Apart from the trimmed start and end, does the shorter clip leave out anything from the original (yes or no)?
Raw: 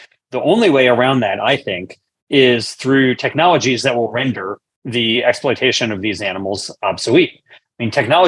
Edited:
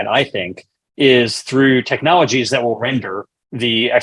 no